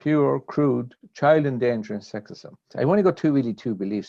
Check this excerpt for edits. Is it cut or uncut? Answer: cut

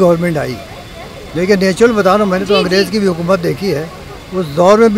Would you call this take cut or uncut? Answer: uncut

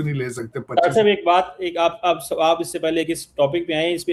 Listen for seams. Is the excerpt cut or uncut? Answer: uncut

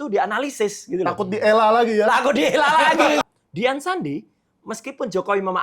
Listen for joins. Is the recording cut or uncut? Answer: cut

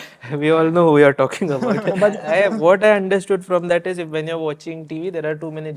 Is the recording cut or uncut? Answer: cut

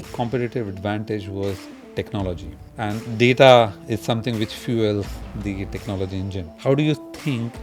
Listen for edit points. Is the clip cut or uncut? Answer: cut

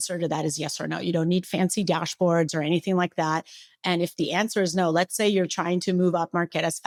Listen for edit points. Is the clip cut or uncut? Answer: uncut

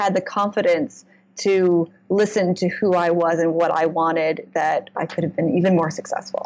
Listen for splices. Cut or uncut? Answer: cut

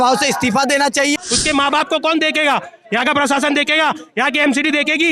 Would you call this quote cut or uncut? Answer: cut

